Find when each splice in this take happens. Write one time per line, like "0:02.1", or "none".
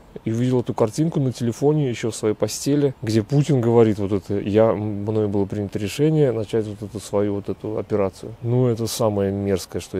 0:03.0
0:08.3